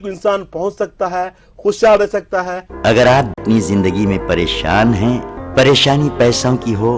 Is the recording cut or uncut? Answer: cut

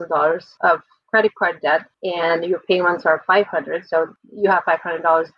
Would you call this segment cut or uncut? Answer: cut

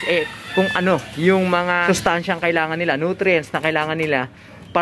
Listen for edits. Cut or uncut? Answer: cut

